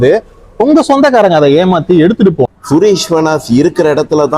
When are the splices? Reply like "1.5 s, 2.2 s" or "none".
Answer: 2.5 s